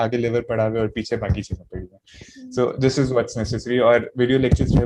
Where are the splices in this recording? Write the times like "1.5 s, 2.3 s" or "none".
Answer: none